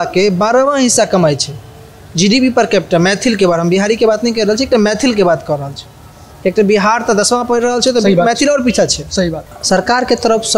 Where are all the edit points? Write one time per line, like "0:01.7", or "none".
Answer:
0:09.5